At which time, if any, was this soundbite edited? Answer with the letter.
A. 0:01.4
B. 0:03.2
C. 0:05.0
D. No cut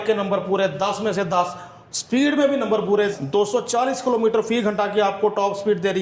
B